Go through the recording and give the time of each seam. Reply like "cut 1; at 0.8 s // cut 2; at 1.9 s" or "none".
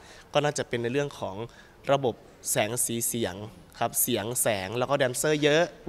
none

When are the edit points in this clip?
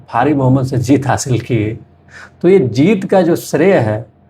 none

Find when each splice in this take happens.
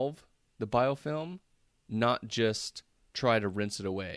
none

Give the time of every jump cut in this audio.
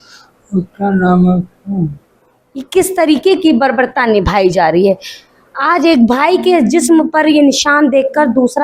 cut 1; at 2.7 s

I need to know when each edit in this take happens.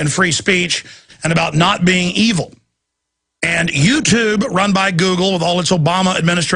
none

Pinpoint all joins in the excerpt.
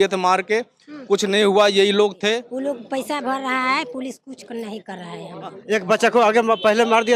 cut 1; at 2.5 s // cut 2; at 5.5 s

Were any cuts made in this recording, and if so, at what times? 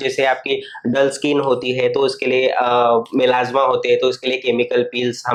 none

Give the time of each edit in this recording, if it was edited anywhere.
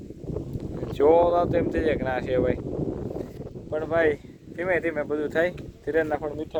none

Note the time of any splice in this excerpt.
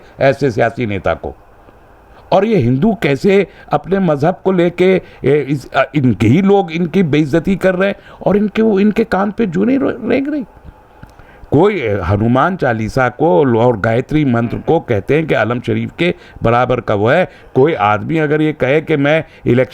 none

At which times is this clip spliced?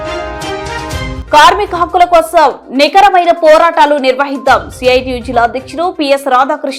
cut 1; at 1.2 s

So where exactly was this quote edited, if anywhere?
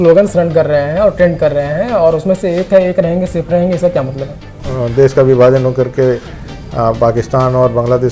cut 1; at 4.6 s

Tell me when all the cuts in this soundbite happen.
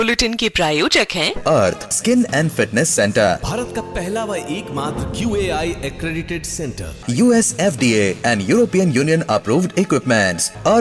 none

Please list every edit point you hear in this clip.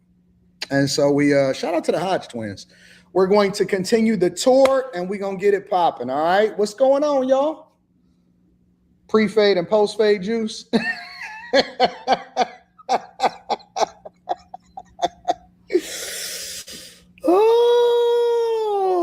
cut 1; at 3.3 s

